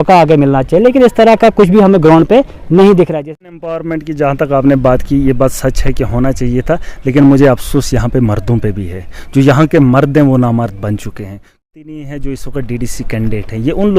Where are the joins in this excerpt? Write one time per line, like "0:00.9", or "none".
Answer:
0:03.5
0:11.6